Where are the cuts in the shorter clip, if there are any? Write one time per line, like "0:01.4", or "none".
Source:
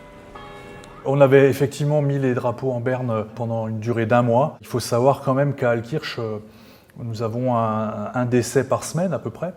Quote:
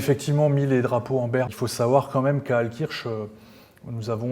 0:01.5